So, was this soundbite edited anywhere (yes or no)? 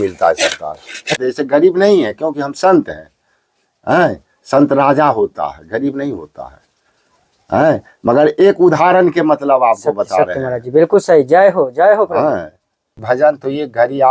yes